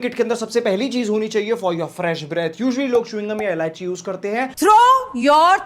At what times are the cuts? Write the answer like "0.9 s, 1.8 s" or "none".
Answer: none